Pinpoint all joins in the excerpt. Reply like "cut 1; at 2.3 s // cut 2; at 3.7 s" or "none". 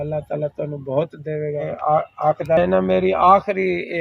cut 1; at 1.7 s